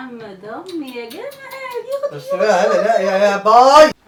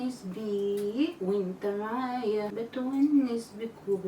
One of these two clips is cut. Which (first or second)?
second